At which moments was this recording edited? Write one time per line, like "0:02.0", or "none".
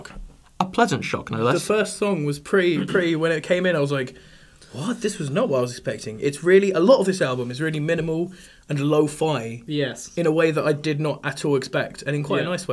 0:10.4